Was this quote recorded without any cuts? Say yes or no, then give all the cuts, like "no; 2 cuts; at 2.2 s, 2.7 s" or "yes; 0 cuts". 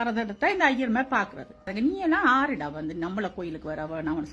no; 1 cut; at 1.7 s